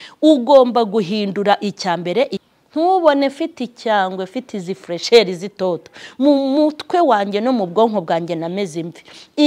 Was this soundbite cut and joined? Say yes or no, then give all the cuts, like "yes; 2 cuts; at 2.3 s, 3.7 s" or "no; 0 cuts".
yes; 1 cut; at 2.4 s